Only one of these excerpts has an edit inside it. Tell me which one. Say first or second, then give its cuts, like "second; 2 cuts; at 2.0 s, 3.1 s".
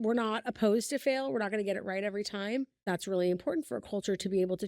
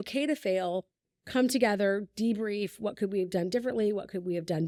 first; 1 cut; at 2.9 s